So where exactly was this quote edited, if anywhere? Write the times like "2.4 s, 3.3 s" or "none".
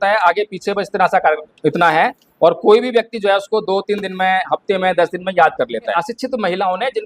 6.0 s